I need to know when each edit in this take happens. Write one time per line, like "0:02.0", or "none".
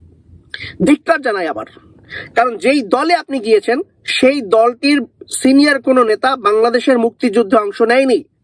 none